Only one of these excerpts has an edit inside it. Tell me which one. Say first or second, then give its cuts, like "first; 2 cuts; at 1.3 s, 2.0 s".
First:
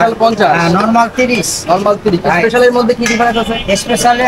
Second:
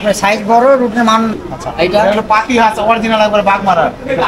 second; 1 cut; at 1.3 s